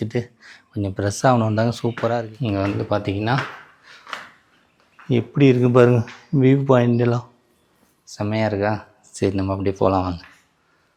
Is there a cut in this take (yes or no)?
yes